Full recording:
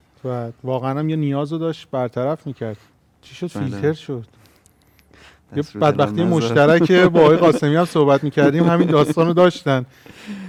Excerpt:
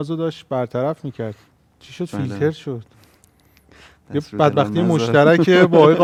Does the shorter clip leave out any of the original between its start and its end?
no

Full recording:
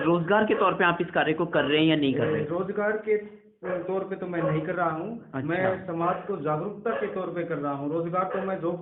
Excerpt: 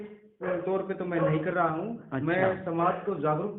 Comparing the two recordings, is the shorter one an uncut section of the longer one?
yes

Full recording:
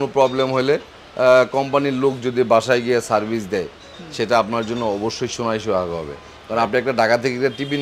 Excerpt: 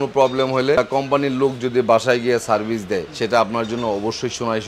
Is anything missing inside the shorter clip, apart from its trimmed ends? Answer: yes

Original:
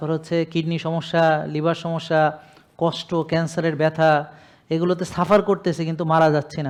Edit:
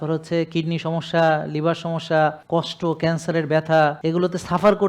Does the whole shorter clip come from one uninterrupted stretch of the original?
no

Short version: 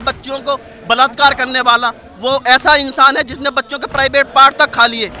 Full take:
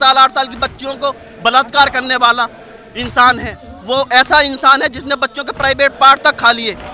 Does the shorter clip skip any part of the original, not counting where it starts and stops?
yes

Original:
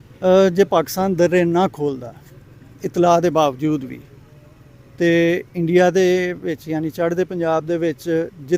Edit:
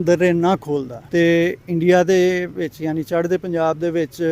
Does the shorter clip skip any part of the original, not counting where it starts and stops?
yes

